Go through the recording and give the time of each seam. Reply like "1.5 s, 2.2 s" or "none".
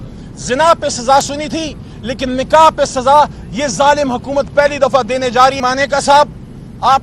5.6 s